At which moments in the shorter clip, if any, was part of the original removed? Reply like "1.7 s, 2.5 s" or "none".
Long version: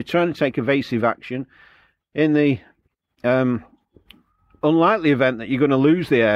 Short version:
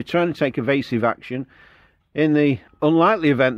2.7 s